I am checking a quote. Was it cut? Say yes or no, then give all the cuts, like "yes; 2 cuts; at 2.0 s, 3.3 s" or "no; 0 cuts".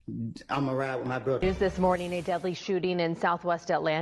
yes; 1 cut; at 1.4 s